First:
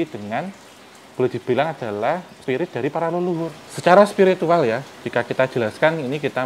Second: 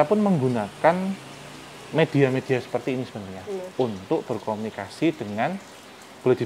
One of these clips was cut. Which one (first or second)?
first